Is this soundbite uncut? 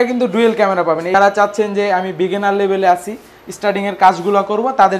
no; 1 cut; at 1.1 s

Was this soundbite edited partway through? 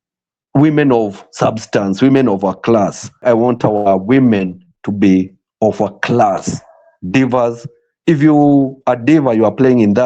yes; 1 cut; at 3.2 s

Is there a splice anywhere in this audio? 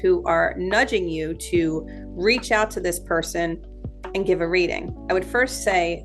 no; 0 cuts

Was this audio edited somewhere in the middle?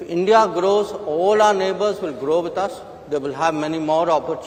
no; 0 cuts

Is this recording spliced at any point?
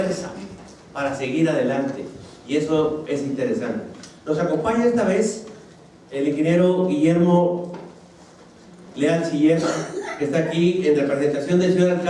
yes; 1 cut; at 6.2 s

